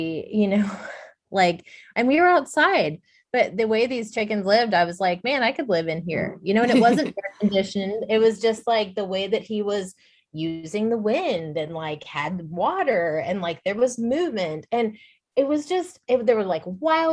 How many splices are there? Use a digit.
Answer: 0